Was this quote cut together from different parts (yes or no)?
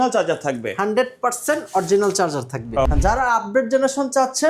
yes